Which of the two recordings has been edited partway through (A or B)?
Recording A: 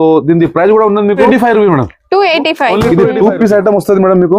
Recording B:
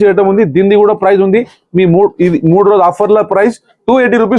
A